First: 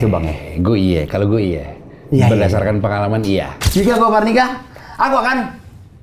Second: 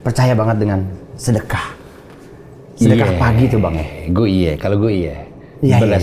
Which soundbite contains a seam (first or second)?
first